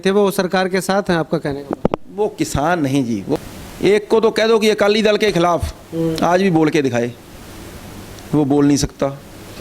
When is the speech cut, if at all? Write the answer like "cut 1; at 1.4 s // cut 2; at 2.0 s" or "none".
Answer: cut 1; at 3.4 s